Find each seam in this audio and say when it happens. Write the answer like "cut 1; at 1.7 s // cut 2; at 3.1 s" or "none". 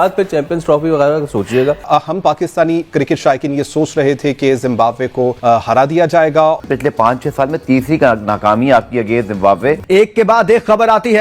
cut 1; at 1.8 s // cut 2; at 6.6 s // cut 3; at 9.8 s

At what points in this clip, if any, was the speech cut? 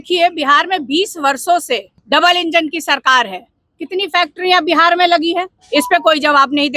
cut 1; at 1.9 s // cut 2; at 5.6 s

